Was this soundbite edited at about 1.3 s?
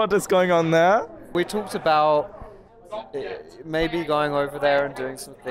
yes; 1 cut; at 1.3 s

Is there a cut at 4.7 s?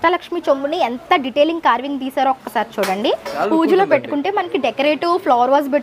no; 1 cut; at 3.3 s

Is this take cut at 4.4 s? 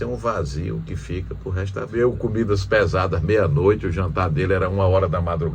no; 1 cut; at 1.9 s

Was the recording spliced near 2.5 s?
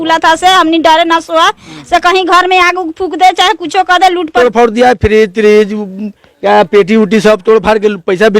no; 1 cut; at 4.3 s

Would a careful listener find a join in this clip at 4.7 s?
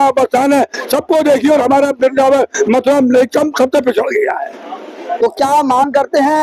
no; 0 cuts

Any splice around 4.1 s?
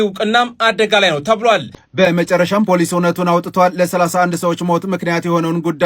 no; 1 cut; at 1.8 s

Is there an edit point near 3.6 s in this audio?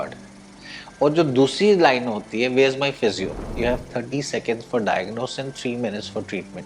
yes; 1 cut; at 3.6 s

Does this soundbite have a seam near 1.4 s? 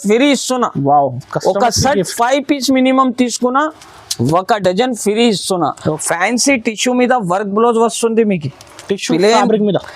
no; 1 cut; at 6.0 s

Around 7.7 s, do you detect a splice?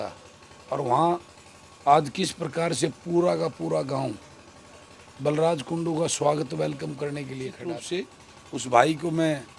yes; 1 cut; at 7.7 s

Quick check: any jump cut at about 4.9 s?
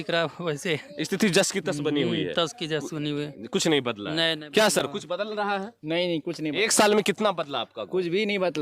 no; 0 cuts

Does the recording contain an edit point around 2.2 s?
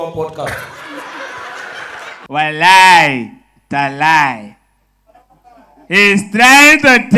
yes; 1 cut; at 2.2 s

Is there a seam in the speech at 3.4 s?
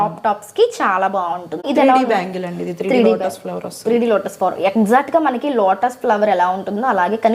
no; 1 cut; at 1.6 s

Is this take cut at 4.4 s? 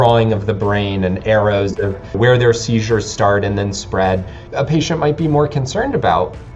yes; 2 cuts; at 2.1 s, 4.4 s

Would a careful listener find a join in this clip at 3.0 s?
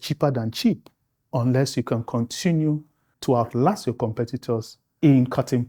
no; 1 cut; at 4.8 s

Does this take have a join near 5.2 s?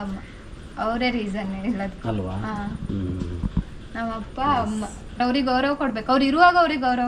yes; 1 cut; at 5.2 s

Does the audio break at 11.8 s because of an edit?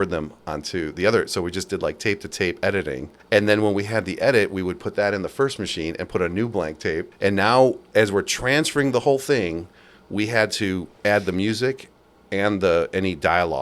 no; 2 cuts; at 3.1 s, 7.1 s

